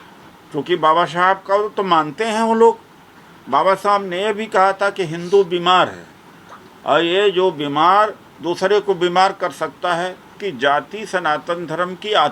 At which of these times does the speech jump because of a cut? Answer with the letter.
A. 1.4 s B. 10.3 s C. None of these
B